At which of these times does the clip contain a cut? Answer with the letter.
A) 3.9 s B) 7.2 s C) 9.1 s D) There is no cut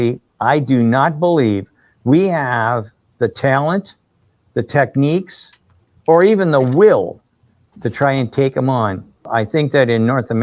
C